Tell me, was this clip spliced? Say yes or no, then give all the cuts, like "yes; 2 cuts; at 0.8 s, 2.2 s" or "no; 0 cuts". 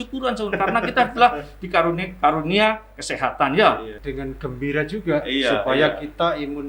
yes; 1 cut; at 4.0 s